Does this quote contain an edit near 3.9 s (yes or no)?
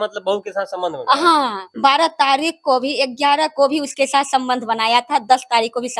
no